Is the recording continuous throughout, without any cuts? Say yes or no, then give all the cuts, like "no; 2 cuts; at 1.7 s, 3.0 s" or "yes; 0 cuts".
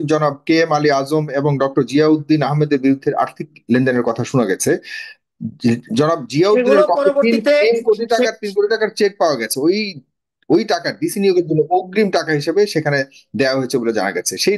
yes; 0 cuts